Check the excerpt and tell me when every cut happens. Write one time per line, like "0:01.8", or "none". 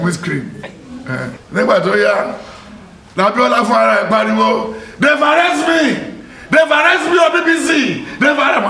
0:01.4